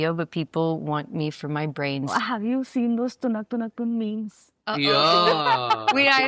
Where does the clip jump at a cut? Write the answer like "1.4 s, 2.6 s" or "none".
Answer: 2.1 s

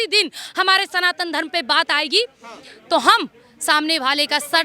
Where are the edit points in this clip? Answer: none

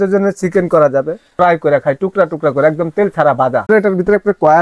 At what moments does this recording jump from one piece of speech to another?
3.7 s

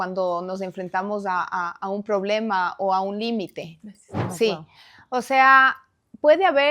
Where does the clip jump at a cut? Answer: 4.2 s

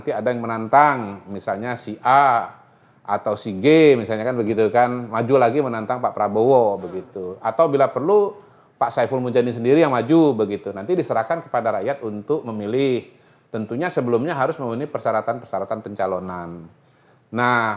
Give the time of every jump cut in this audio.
none

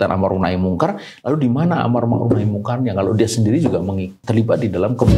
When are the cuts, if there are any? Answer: 4.2 s

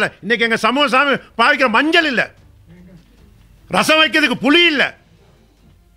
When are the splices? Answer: none

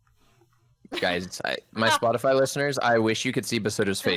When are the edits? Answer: none

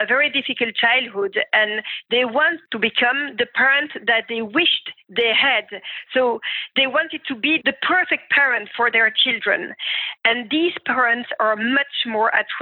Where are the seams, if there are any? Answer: 2.6 s

